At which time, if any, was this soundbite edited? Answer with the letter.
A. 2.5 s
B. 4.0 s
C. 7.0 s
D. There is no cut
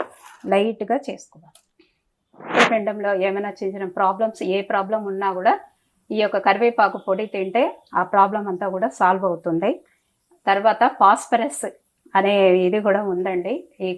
A